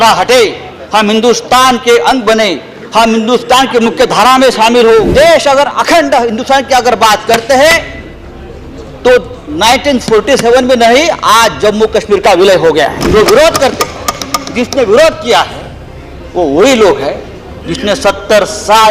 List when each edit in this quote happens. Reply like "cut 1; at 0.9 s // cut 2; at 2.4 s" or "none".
cut 1; at 5.1 s // cut 2; at 13.0 s